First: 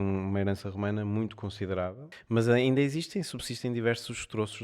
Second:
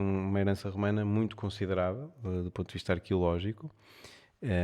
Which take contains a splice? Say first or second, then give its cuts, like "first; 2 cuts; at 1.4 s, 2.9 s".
first; 1 cut; at 2.1 s